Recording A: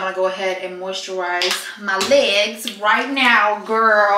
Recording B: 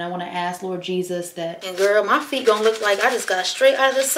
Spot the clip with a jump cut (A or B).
B